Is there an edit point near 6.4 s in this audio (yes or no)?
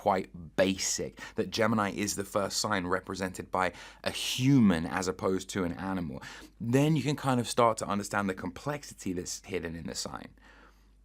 no